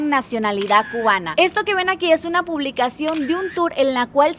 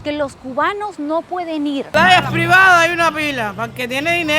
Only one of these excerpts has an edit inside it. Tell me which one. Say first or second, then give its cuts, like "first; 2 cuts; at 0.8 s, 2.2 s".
second; 1 cut; at 1.9 s